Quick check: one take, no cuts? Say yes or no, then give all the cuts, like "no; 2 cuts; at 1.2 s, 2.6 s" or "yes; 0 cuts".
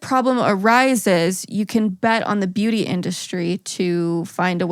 yes; 0 cuts